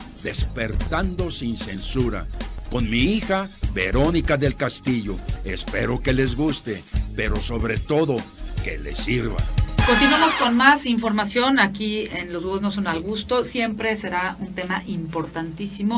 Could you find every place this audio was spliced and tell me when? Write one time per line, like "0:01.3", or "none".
none